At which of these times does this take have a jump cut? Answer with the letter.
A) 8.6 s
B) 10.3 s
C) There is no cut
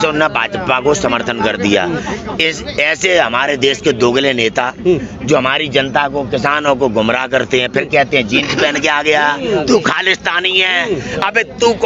C